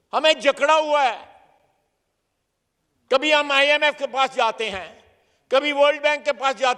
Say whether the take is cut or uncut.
uncut